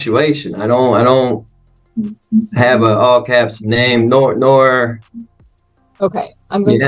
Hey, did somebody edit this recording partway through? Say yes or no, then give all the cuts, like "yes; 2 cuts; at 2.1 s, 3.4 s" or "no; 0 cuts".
no; 0 cuts